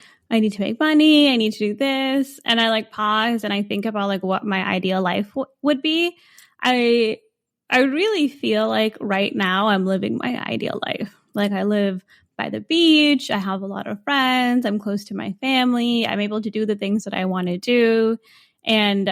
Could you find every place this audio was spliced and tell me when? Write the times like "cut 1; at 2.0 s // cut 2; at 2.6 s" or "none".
none